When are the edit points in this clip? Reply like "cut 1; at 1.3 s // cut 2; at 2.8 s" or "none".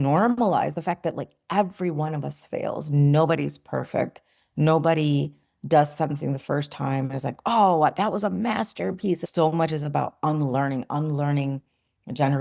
cut 1; at 9.3 s